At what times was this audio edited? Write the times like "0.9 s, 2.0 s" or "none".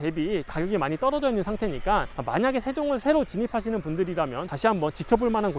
none